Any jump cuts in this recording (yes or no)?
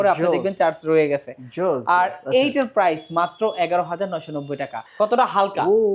yes